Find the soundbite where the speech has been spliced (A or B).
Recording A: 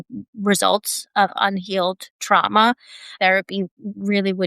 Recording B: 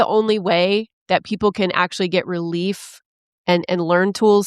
A